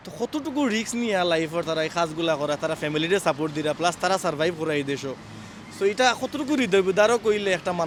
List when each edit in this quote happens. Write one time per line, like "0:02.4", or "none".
none